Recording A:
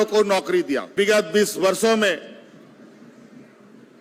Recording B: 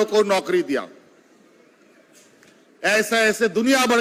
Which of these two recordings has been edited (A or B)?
A